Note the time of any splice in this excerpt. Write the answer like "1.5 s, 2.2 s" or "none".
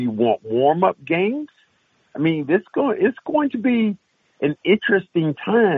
none